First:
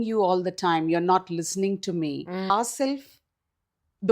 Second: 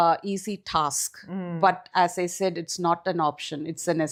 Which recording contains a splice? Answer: first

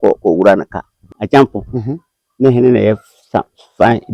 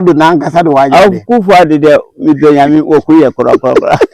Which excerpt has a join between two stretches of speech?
first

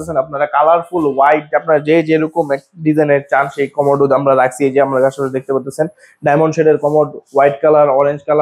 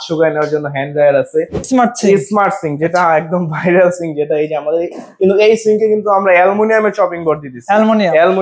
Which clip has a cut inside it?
second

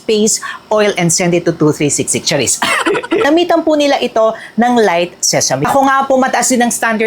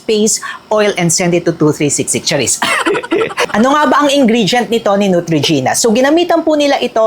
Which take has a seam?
first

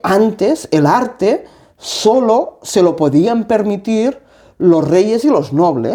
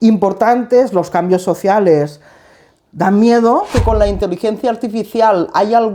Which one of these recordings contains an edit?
second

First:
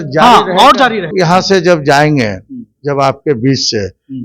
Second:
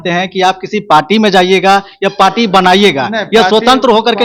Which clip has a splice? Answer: first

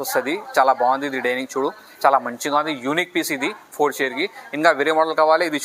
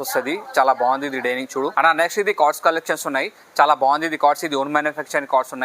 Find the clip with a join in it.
second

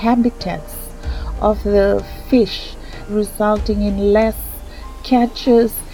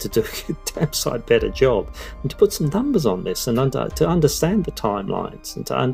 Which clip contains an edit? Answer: first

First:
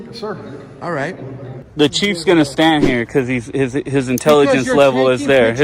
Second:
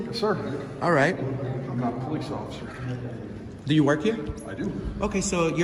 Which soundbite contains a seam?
first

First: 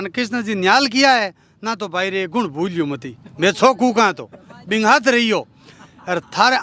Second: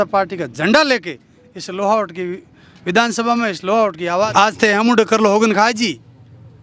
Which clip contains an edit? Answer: second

